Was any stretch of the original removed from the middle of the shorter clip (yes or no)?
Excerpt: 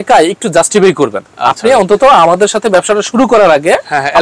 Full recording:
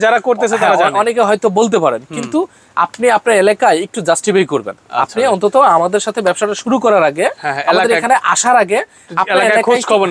no